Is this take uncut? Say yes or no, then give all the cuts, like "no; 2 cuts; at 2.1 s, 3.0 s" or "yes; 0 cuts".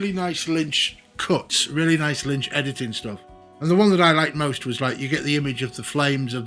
no; 1 cut; at 3.4 s